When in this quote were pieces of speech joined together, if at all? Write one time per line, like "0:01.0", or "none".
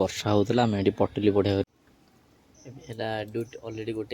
0:01.7

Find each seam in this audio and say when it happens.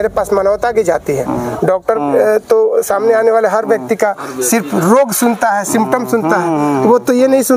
none

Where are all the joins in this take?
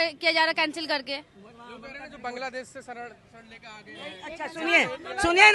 none

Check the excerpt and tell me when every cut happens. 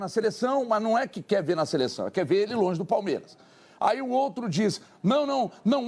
none

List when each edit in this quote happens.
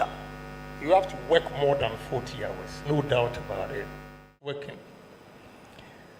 0:04.3

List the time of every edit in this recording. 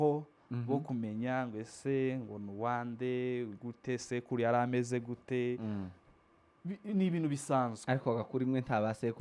none

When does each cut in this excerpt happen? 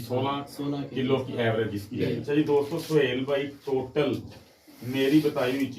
0:02.2

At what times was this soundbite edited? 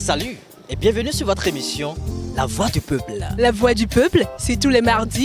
none

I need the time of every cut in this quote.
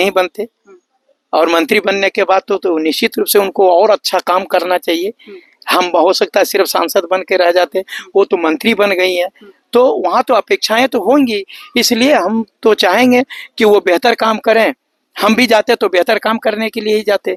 none

